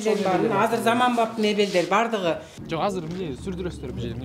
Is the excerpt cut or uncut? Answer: cut